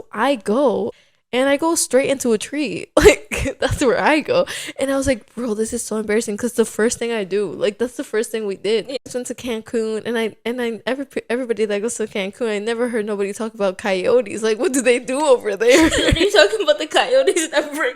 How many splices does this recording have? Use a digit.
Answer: 2